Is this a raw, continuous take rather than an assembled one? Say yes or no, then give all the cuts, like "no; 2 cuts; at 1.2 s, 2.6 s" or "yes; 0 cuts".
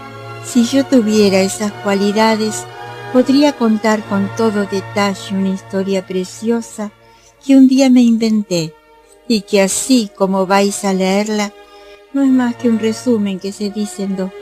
no; 1 cut; at 3.4 s